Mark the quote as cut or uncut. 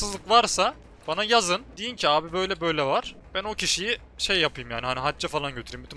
cut